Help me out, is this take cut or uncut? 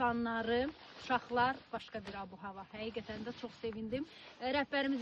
uncut